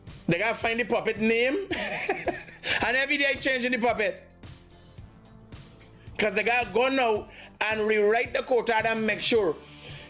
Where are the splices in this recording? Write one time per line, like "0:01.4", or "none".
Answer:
none